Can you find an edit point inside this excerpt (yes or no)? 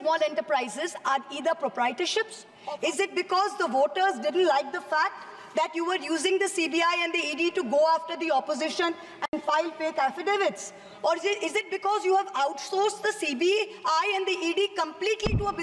yes